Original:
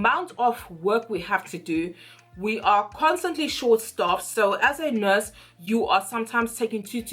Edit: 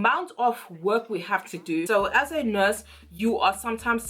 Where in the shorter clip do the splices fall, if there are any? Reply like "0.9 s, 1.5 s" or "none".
1.8 s